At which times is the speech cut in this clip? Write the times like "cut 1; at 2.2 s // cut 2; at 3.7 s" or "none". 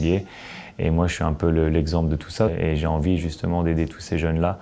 cut 1; at 2.5 s